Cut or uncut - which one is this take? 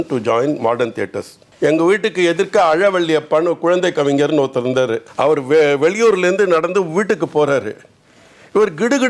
cut